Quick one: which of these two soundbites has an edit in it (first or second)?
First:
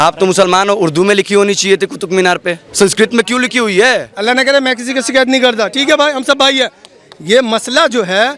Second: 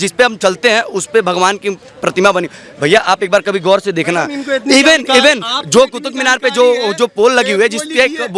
first